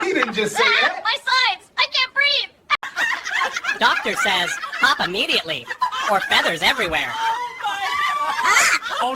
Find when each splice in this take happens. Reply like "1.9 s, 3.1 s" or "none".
2.9 s